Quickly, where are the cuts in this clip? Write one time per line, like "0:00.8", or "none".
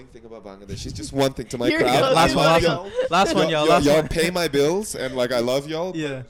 none